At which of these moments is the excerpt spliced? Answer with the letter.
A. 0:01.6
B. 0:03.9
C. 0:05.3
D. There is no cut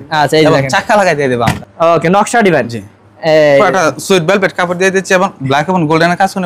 A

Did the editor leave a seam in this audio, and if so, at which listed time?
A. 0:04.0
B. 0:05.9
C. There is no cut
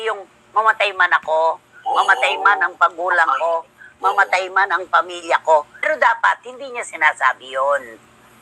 B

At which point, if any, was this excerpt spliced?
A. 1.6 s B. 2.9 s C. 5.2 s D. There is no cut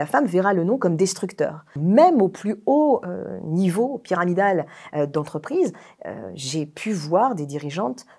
D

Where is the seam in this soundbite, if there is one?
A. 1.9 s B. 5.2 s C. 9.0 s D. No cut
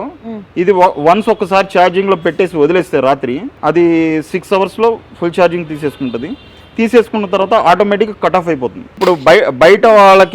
C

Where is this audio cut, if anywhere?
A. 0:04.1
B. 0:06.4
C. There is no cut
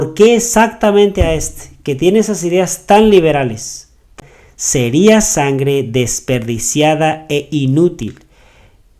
A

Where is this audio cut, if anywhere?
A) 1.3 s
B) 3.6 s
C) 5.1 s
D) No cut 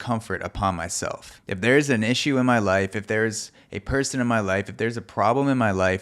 A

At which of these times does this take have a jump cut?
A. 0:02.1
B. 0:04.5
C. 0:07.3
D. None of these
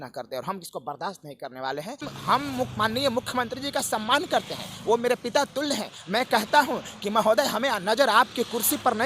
A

